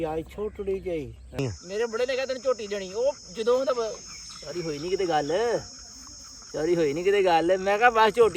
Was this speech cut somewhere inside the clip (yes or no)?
yes